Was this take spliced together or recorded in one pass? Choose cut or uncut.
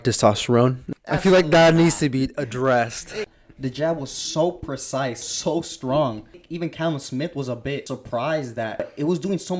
cut